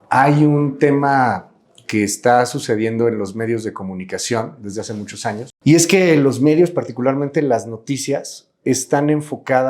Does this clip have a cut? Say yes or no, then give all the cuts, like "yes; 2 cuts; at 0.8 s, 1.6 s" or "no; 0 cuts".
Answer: yes; 1 cut; at 5.5 s